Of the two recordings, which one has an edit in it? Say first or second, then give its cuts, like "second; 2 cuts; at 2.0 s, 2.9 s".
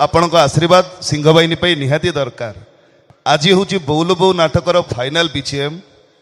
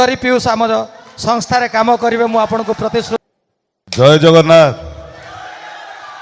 second; 1 cut; at 3.2 s